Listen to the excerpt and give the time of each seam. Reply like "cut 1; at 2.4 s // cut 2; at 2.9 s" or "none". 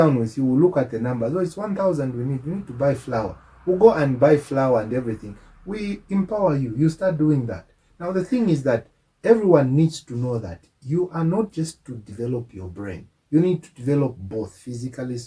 none